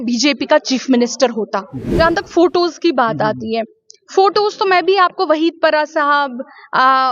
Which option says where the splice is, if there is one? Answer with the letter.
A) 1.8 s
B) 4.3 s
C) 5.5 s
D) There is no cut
A